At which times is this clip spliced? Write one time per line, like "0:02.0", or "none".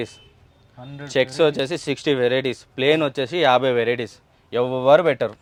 none